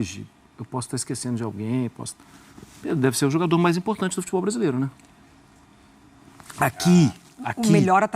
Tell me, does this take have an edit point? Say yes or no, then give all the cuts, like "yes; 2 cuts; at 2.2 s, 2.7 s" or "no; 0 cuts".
no; 0 cuts